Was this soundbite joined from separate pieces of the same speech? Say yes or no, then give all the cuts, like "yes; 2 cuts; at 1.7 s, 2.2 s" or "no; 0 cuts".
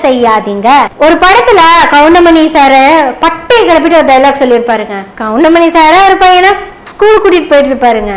yes; 1 cut; at 0.9 s